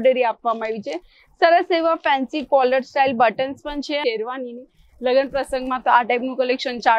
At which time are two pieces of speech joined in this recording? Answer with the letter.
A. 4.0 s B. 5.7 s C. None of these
A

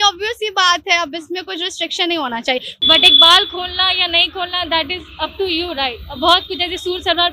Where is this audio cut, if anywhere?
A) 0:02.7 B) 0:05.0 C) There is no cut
A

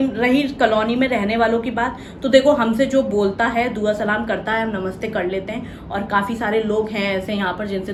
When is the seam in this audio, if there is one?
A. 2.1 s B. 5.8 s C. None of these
C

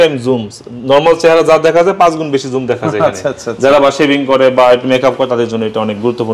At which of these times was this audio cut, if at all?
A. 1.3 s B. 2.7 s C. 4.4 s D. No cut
D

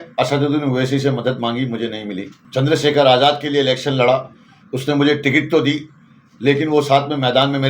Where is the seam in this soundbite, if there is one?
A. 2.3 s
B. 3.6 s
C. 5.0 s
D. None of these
A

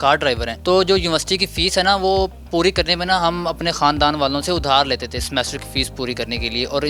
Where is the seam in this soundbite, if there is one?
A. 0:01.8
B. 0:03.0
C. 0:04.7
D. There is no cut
D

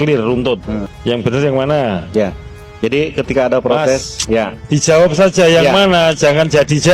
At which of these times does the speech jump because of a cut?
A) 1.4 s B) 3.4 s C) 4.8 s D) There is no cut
D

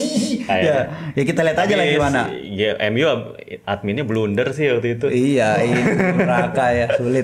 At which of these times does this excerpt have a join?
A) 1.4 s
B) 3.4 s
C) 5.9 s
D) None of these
D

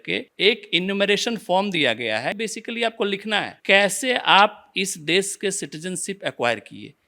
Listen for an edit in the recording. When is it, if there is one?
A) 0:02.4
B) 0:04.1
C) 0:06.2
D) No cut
A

